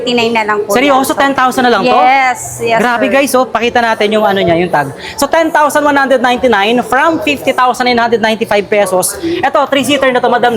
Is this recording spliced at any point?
no; 0 cuts

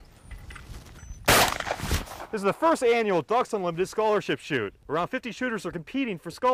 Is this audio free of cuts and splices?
yes; 0 cuts

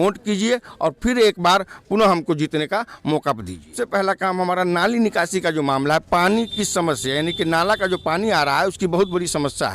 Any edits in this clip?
yes; 1 cut; at 3.7 s

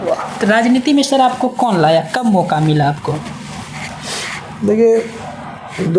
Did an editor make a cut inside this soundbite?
no; 0 cuts

